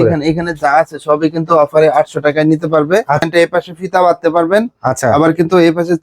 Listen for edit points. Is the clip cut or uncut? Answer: cut